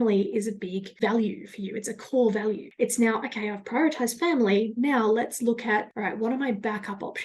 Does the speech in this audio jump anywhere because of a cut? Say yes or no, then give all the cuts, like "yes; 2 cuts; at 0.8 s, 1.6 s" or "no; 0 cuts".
yes; 3 cuts; at 1.0 s, 2.7 s, 5.9 s